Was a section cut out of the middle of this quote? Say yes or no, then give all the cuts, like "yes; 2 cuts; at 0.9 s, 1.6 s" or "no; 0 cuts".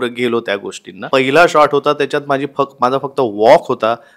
yes; 1 cut; at 1.0 s